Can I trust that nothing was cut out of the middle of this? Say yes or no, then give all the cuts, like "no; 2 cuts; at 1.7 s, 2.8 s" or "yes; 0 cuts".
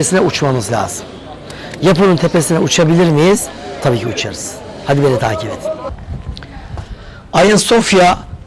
yes; 0 cuts